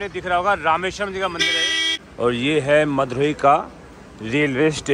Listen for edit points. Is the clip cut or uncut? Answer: cut